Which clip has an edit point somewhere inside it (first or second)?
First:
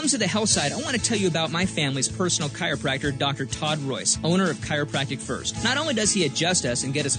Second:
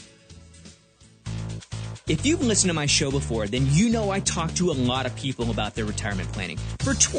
second